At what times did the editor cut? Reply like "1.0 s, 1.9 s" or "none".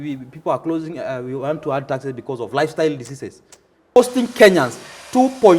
4.0 s